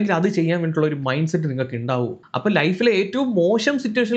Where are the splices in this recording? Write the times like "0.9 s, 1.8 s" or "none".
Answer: 2.2 s